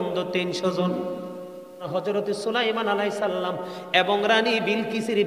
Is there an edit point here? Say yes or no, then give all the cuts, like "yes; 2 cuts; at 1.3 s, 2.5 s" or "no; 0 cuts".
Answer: yes; 1 cut; at 1.9 s